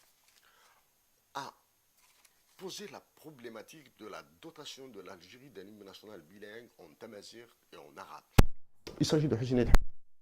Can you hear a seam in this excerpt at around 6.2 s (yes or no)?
no